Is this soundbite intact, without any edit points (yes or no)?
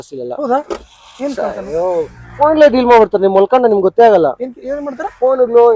yes